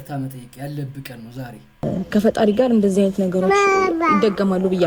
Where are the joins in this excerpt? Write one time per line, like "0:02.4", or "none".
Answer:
0:01.8

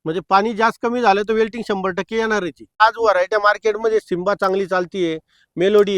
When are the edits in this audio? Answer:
0:02.8

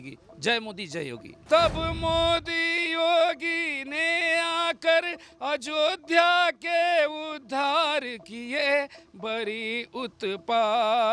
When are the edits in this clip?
0:01.3

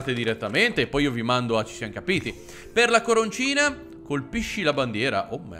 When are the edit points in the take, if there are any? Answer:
none

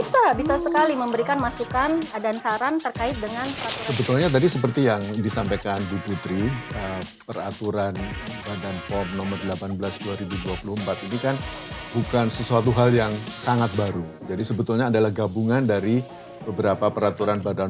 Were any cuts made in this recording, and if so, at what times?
0:03.7

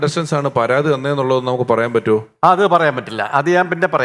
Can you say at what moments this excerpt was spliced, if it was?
none

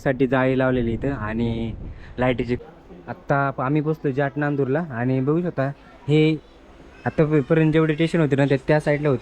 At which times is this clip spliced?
0:02.6

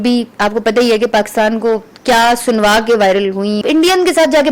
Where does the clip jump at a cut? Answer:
0:03.6

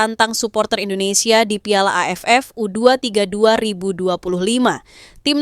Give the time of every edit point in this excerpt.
none

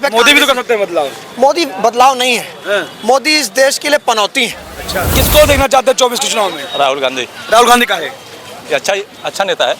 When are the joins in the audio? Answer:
0:05.0

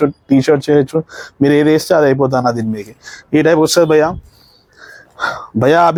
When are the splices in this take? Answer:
none

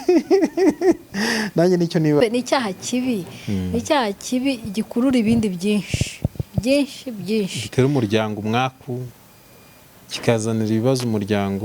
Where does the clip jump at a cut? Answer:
0:02.2

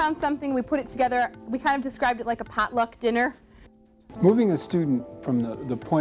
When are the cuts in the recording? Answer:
0:03.9

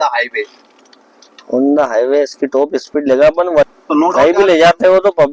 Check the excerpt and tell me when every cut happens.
0:03.7

